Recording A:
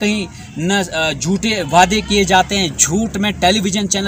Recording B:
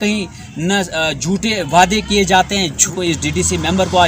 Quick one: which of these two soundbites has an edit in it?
B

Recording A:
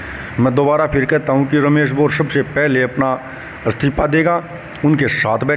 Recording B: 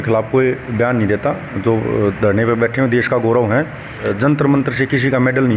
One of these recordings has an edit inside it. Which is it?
B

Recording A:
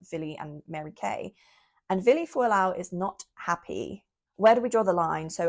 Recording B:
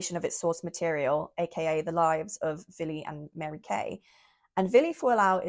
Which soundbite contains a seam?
A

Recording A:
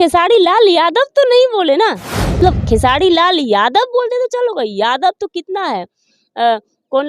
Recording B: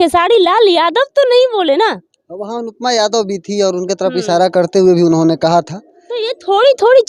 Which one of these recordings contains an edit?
A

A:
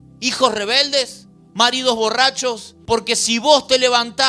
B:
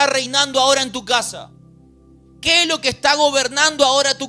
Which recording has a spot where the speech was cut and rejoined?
A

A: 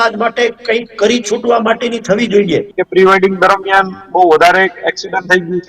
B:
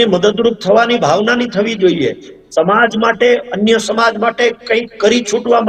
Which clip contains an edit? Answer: A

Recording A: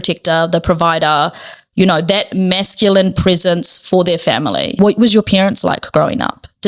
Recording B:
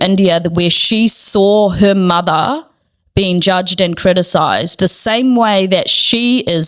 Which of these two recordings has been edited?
A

